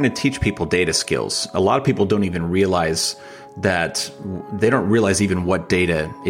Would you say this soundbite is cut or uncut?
uncut